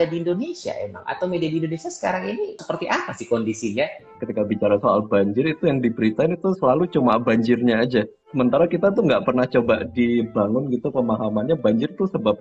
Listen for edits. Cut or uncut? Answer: cut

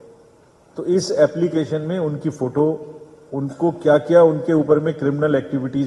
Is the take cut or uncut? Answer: uncut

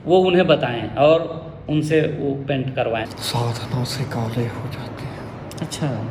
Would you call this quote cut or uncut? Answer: cut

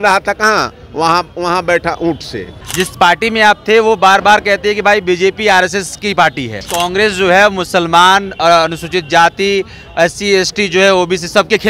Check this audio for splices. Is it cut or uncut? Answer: cut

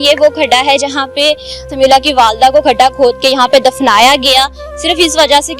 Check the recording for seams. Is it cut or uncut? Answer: uncut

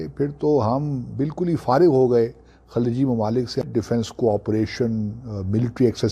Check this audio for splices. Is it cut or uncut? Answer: cut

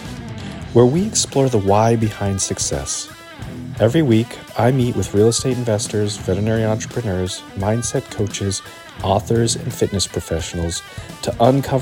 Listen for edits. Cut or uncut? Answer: uncut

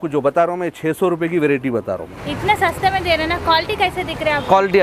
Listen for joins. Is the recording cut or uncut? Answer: cut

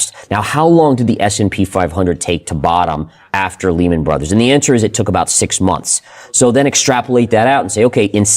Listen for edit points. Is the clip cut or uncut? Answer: uncut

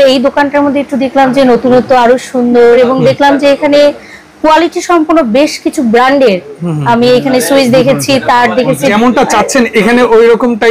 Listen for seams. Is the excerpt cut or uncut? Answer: cut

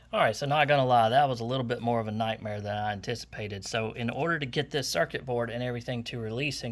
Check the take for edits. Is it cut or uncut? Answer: uncut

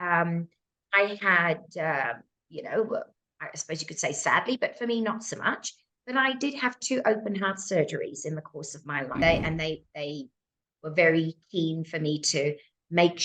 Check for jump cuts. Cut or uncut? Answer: cut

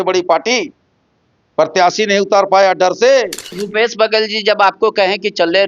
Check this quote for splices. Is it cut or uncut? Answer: cut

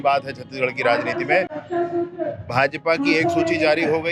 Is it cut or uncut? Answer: uncut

